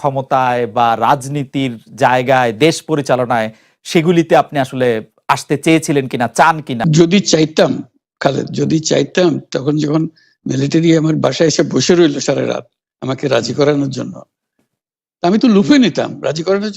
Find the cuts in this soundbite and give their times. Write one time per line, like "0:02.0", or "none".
0:06.8